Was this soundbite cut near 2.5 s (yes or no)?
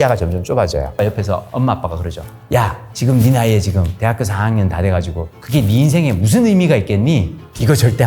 yes